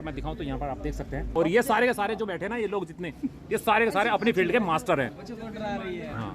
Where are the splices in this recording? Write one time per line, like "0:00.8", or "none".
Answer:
0:01.3